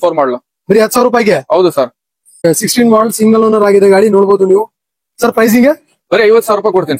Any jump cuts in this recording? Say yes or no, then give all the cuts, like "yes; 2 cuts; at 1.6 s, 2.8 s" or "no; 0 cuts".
yes; 1 cut; at 2.4 s